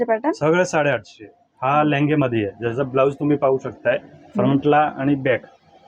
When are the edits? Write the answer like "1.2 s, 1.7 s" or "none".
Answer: none